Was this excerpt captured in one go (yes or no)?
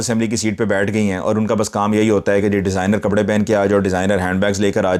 yes